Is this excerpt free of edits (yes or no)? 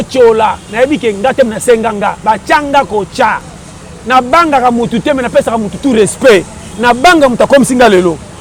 yes